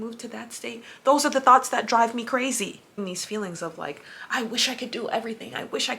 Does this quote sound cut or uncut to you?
cut